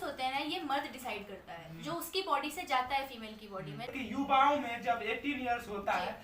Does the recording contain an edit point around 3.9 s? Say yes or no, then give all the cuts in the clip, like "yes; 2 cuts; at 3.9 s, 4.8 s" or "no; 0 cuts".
yes; 1 cut; at 3.9 s